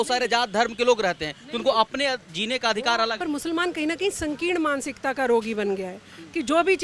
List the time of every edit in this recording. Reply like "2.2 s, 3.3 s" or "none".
3.2 s